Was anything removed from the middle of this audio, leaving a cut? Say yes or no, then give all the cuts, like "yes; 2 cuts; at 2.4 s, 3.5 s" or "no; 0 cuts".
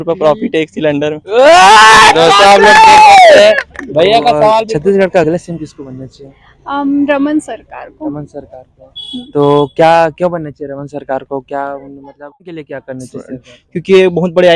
yes; 2 cuts; at 4.7 s, 12.6 s